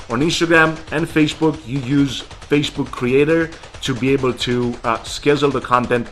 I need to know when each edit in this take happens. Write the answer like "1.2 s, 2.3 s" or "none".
none